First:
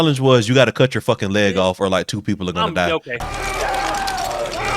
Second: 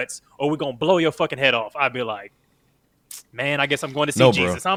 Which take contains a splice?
first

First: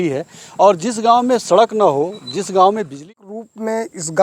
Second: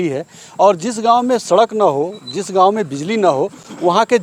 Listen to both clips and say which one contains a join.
first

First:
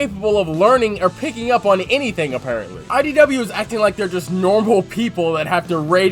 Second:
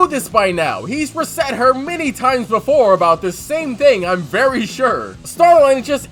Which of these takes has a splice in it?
first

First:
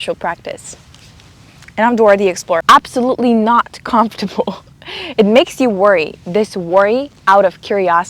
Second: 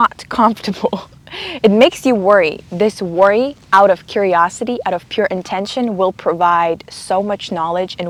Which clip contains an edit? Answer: first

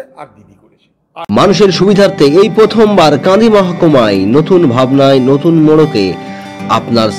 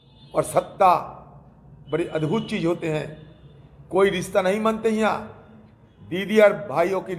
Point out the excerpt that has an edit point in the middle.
first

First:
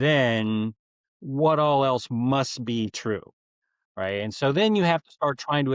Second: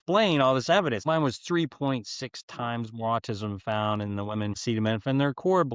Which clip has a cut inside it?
second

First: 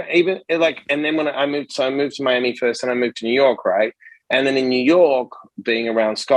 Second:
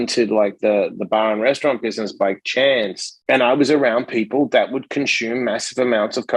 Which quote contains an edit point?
second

